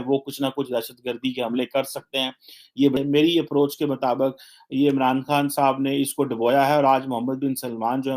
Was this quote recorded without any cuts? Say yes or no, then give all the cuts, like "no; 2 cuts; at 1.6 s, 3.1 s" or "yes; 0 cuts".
no; 1 cut; at 3.0 s